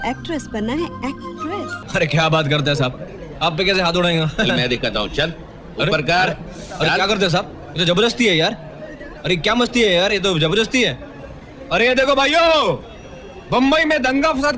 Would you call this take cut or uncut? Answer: cut